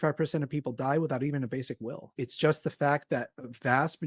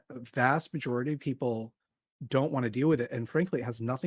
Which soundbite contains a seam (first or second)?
first